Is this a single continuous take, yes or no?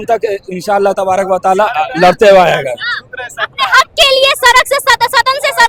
yes